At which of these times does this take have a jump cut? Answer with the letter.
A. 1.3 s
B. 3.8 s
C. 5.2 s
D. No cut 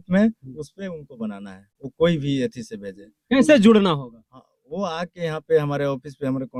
D